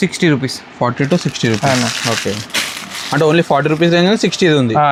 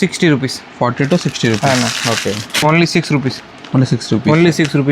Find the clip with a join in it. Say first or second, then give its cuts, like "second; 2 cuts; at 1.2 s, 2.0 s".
second; 1 cut; at 2.6 s